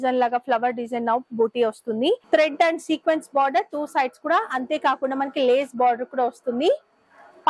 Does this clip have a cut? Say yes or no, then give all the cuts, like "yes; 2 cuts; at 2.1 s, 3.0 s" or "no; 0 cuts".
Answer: yes; 1 cut; at 2.2 s